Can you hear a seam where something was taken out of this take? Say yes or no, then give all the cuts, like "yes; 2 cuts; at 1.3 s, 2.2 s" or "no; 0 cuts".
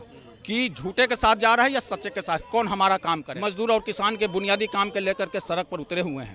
yes; 1 cut; at 3.3 s